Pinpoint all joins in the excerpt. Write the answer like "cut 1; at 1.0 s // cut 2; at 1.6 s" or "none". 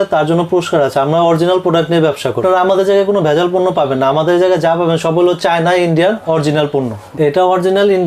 cut 1; at 2.4 s // cut 2; at 7.0 s

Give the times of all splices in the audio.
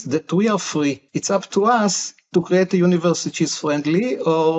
cut 1; at 1.0 s

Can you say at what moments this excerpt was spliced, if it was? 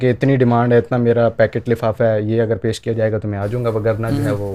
none

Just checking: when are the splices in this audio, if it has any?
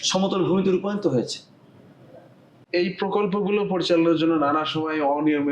cut 1; at 2.5 s

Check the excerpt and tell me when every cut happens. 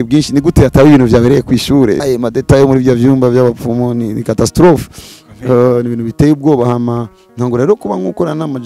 cut 1; at 2.0 s

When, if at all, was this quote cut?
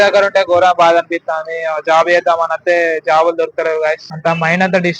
cut 1; at 4.1 s

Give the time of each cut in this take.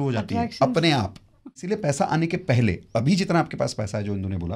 cut 1; at 1.5 s

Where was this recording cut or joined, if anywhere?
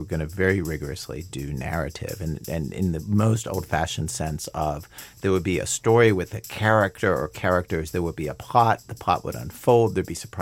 none

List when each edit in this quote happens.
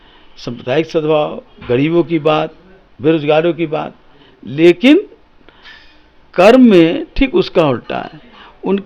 none

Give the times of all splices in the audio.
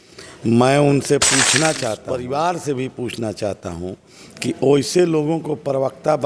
cut 1; at 2.0 s

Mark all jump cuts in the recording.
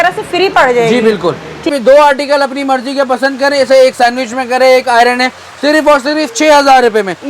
cut 1; at 1.6 s

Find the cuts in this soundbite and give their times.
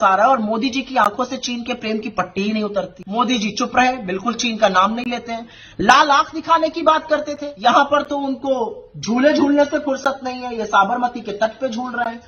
cut 1; at 3.0 s // cut 2; at 7.4 s

